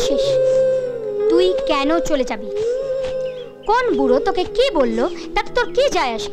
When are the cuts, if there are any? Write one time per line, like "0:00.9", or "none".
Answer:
none